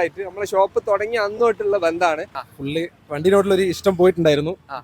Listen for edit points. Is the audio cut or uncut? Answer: cut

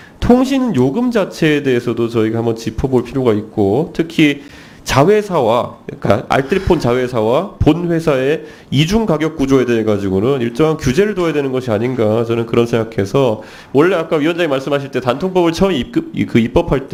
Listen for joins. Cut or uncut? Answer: uncut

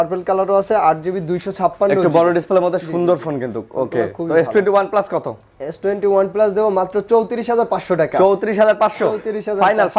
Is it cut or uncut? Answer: uncut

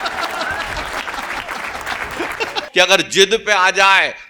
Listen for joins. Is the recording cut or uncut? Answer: cut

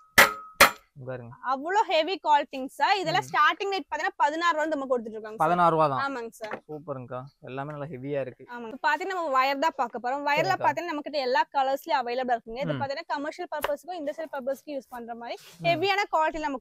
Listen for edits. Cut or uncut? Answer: uncut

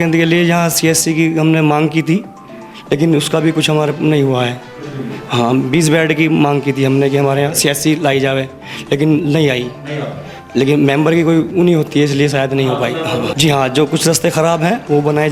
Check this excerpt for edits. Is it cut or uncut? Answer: uncut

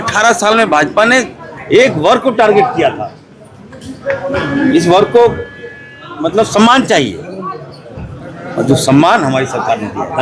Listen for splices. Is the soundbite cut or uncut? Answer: uncut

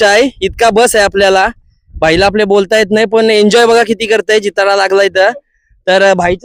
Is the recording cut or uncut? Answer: uncut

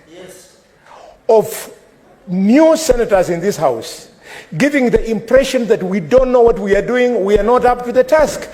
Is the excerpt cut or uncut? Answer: uncut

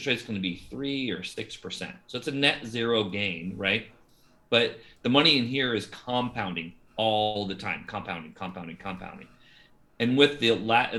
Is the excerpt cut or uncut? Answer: uncut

